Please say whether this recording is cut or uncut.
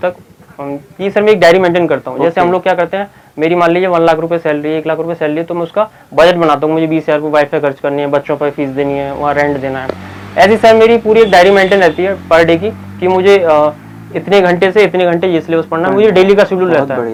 uncut